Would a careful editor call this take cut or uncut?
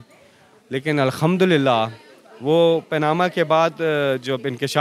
uncut